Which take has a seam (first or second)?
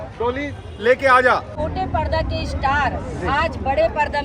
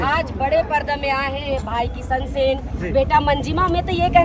first